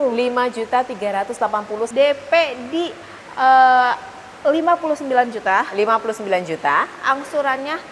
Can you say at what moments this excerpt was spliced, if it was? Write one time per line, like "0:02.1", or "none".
0:01.9